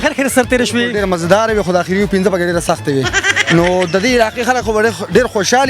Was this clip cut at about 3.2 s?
yes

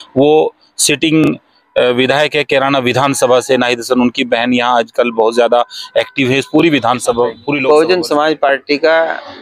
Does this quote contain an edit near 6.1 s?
no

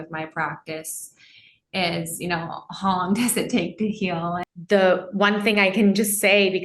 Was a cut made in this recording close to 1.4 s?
no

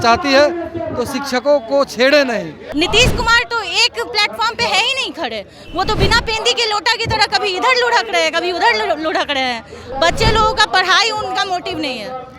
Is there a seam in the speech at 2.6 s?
yes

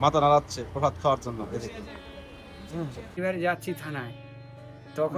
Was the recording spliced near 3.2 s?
yes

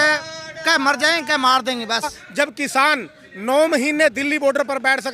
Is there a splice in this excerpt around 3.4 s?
no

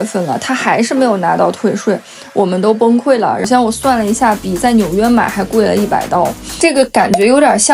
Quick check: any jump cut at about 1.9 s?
no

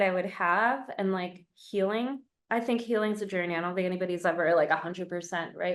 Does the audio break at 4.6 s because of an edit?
no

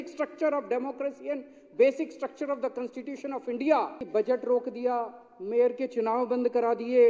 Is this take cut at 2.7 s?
no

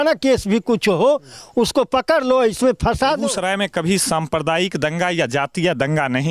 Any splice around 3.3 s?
yes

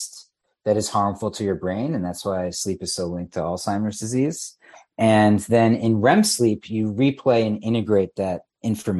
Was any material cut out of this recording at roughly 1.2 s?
no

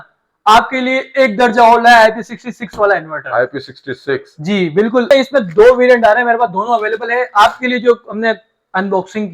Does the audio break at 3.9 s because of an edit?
no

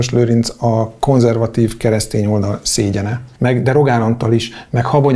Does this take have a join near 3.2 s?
yes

